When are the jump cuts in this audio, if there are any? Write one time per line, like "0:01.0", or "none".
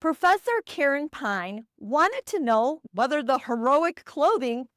0:02.8